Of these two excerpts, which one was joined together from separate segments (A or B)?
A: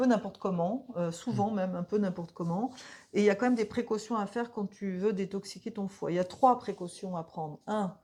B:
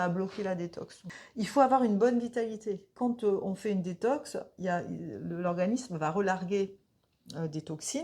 B